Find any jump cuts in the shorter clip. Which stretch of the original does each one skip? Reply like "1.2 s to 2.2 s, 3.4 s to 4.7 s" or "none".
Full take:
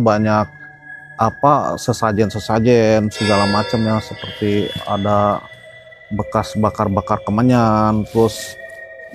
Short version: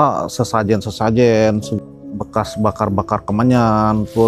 3.2 s to 5.7 s